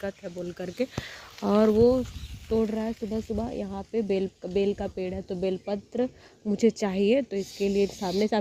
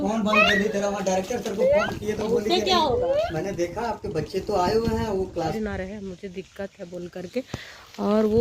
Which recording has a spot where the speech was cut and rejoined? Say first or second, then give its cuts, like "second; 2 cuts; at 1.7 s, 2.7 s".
second; 1 cut; at 5.5 s